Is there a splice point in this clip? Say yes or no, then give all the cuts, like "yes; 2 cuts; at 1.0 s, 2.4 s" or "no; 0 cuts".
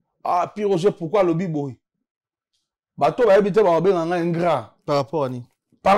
no; 0 cuts